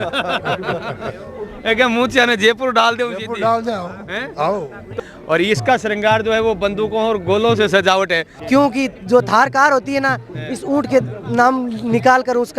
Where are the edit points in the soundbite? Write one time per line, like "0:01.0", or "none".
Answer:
0:04.9
0:08.3